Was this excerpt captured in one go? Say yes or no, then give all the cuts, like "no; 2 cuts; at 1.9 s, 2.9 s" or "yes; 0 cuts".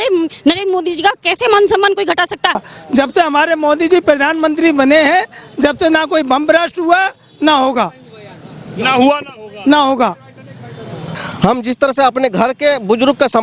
no; 2 cuts; at 2.6 s, 11.1 s